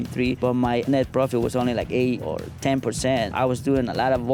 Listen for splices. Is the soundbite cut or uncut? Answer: uncut